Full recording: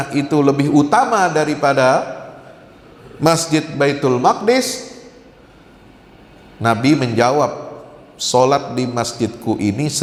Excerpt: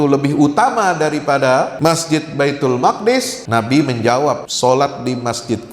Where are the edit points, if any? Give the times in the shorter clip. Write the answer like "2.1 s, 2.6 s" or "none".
1.7 s, 3.4 s, 4.5 s